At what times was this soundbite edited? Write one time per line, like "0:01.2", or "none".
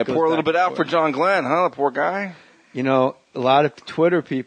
none